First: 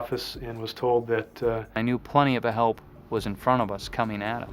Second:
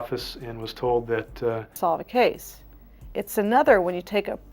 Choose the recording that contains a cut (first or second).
second